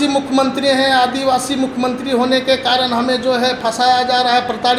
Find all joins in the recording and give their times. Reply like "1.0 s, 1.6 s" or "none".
none